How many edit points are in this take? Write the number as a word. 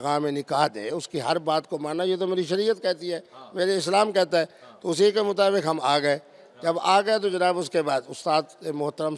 zero